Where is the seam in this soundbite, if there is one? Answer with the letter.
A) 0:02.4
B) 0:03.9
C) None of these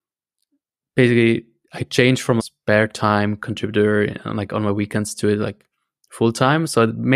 A